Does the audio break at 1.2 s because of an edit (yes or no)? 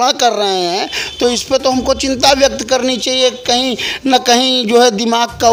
no